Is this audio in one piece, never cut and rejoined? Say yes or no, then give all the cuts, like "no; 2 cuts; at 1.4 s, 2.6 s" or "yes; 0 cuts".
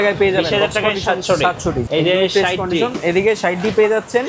yes; 0 cuts